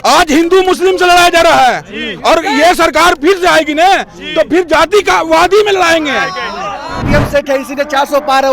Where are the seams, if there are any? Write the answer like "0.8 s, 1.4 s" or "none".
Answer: 7.0 s